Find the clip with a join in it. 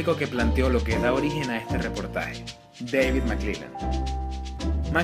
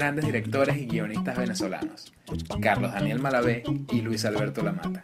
second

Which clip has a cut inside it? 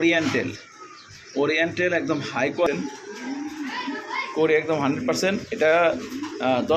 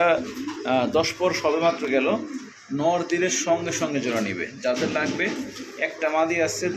first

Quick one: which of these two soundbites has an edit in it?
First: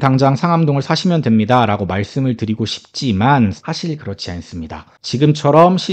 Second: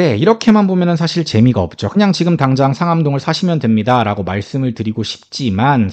first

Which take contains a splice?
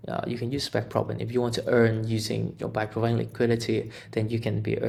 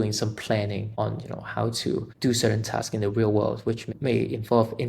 second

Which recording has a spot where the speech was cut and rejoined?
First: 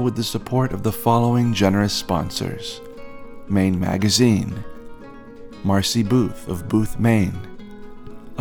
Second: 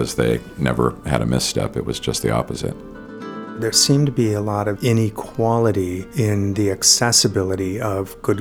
second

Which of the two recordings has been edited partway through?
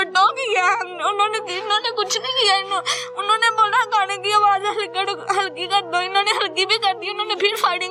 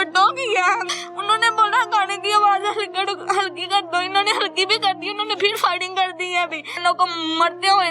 second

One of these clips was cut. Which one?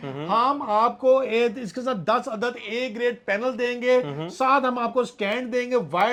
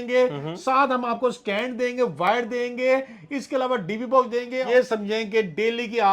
second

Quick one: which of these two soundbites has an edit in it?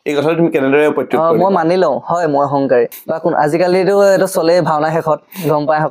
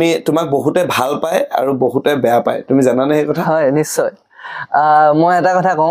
first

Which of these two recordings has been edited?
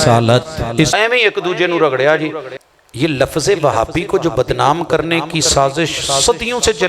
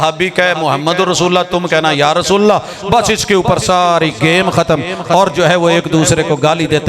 first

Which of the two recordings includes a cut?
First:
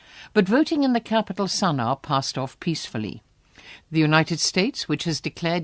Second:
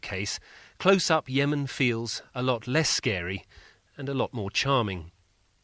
second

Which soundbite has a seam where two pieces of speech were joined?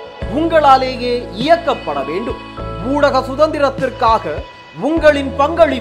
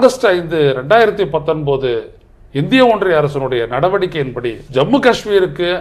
second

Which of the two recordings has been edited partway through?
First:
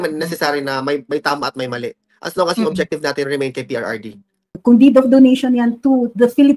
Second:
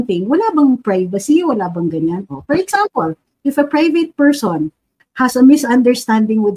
first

